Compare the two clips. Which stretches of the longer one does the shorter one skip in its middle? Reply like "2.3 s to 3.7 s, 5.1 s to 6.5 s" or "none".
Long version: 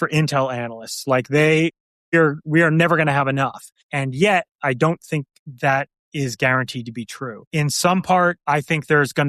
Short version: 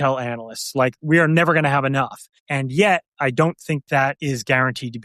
1.3 s to 2.4 s, 5.5 s to 6.0 s